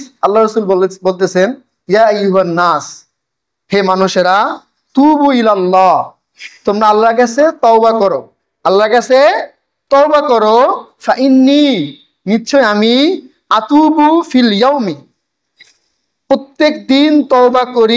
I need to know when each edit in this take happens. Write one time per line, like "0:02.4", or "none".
none